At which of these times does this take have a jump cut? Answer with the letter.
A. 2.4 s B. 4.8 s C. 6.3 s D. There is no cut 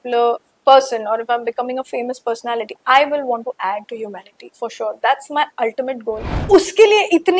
C